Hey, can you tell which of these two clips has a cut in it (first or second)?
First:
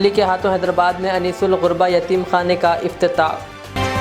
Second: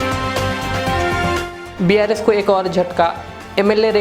second